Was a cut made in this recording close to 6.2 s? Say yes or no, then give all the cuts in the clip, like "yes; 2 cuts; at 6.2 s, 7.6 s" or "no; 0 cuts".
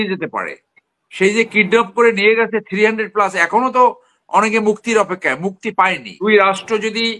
yes; 1 cut; at 6.2 s